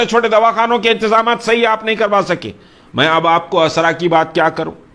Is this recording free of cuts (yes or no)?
yes